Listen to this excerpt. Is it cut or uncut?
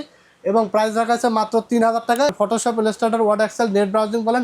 cut